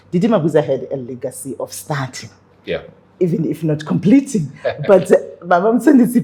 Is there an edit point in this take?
no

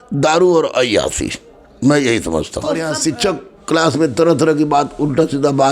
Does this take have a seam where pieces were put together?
yes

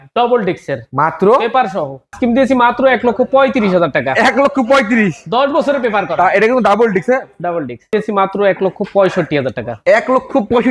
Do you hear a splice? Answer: yes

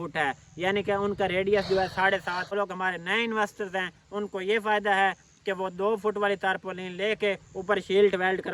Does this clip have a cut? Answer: yes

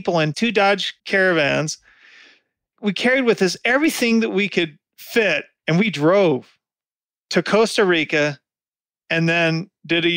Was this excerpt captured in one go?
no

